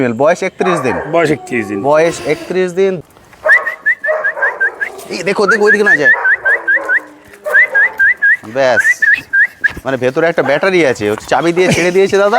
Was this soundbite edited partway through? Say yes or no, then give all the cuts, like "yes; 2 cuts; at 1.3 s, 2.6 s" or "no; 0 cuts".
yes; 1 cut; at 3.0 s